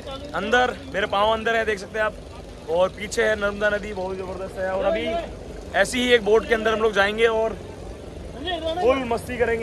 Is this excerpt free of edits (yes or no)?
yes